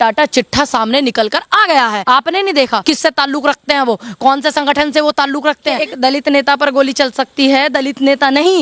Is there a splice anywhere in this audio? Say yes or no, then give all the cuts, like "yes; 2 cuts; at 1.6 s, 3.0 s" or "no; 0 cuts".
yes; 3 cuts; at 2.0 s, 2.8 s, 5.9 s